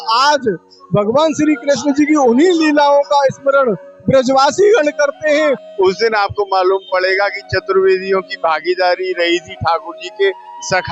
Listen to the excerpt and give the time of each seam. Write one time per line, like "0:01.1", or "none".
0:05.7

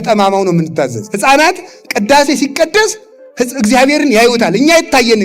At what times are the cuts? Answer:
0:01.0

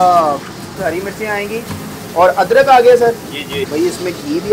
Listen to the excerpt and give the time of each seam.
0:00.8
0:03.5

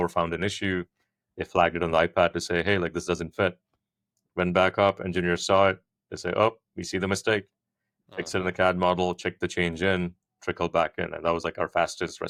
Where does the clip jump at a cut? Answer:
none

